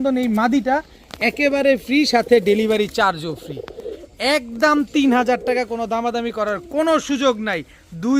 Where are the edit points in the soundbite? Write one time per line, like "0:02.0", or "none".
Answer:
none